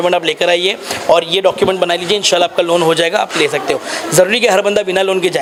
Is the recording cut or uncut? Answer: uncut